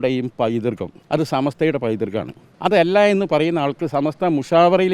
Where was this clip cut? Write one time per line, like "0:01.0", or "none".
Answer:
0:00.9
0:02.4